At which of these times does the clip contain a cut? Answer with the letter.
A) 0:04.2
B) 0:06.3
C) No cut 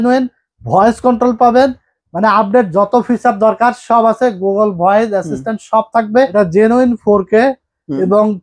B